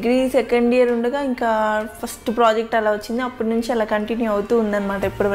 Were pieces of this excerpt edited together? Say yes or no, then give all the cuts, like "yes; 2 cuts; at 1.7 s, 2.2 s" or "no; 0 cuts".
no; 0 cuts